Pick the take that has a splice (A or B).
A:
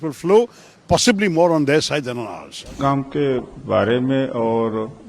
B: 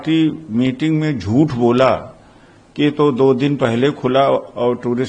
A